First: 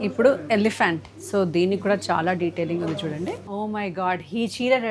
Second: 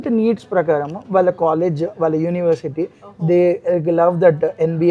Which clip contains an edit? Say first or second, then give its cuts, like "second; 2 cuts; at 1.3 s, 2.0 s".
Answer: first; 1 cut; at 3.4 s